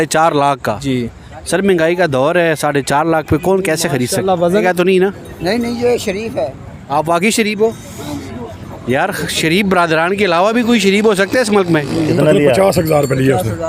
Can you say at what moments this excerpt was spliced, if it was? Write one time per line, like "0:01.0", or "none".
0:04.6
0:12.1